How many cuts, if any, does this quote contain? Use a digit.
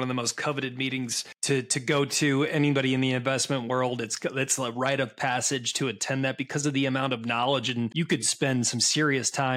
2